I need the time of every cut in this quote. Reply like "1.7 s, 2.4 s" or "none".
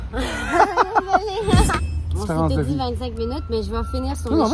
1.8 s